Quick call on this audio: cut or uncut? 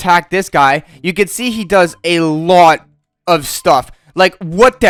uncut